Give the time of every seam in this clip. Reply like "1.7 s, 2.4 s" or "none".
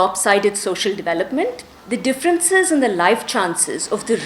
1.7 s